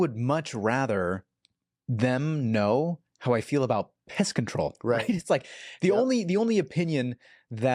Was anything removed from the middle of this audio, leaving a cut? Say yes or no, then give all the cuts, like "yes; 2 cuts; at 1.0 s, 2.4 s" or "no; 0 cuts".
no; 0 cuts